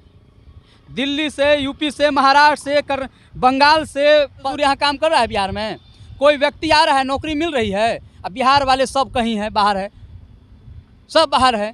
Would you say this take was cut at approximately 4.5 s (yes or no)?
yes